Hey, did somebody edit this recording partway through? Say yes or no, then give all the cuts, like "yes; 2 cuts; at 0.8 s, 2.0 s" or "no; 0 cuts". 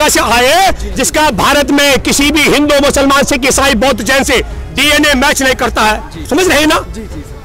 yes; 1 cut; at 6.3 s